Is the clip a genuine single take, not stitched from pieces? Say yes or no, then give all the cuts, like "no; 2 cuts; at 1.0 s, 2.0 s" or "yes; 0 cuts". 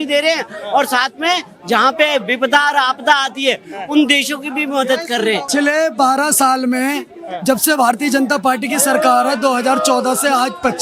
no; 1 cut; at 5.5 s